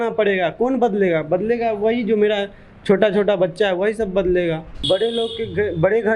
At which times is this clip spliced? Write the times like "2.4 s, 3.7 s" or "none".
4.7 s